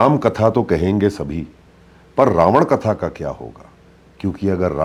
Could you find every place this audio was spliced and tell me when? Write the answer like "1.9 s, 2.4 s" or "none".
none